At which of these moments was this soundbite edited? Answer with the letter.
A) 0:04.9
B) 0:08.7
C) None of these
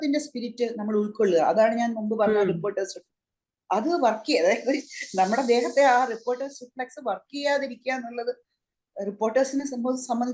C